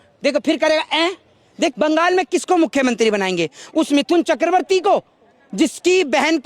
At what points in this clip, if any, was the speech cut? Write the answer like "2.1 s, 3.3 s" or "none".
1.7 s